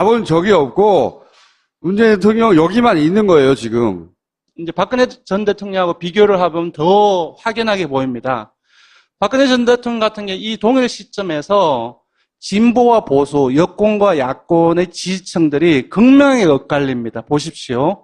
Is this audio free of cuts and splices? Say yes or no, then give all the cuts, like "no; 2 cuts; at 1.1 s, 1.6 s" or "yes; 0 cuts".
no; 1 cut; at 9.1 s